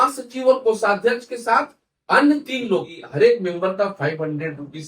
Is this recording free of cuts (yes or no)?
no